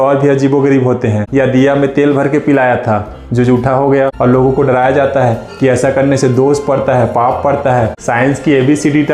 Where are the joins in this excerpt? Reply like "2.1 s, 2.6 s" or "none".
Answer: 1.2 s, 4.1 s, 8.0 s